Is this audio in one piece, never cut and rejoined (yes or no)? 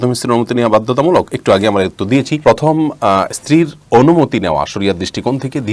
yes